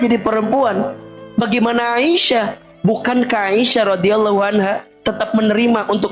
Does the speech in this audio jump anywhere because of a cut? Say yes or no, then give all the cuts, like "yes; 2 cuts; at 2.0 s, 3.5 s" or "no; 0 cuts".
yes; 2 cuts; at 1.1 s, 2.6 s